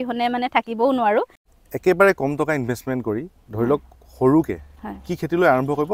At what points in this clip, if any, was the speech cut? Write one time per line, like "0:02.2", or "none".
0:01.4

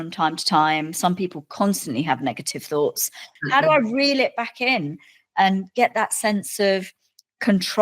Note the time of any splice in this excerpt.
0:03.2

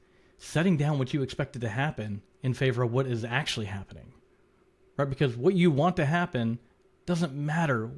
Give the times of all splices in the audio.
none

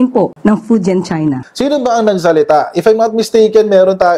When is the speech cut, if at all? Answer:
0:01.4

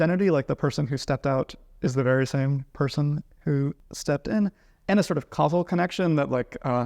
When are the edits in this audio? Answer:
0:03.9

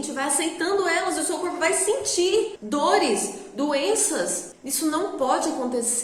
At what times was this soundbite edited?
none

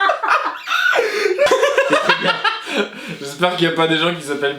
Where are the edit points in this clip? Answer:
0:01.5

